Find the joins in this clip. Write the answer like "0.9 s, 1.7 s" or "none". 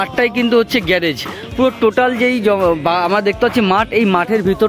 none

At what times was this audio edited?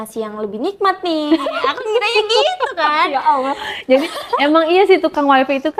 none

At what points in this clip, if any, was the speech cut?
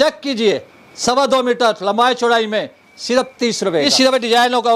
3.8 s

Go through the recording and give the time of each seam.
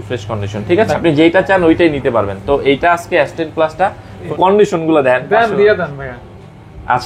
1.0 s, 4.3 s

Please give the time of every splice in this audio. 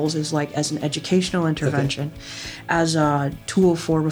3.2 s

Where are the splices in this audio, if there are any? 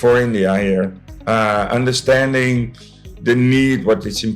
none

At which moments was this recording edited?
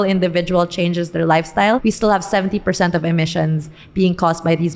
1.8 s

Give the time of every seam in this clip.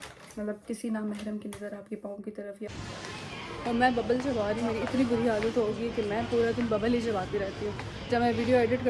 2.7 s

